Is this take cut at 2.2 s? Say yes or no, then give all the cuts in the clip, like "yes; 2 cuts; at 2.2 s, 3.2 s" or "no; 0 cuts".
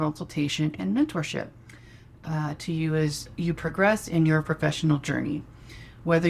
no; 0 cuts